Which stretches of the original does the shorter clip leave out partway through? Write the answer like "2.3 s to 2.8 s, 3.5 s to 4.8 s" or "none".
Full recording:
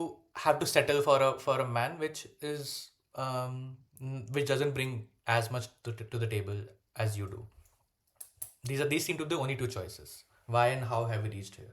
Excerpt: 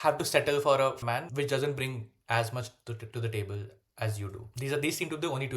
1.4 s to 4.0 s, 7.4 s to 8.5 s